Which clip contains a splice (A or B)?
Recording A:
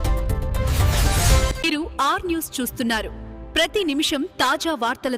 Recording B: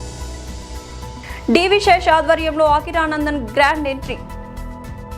B